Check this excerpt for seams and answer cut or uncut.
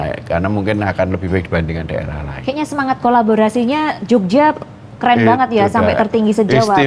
uncut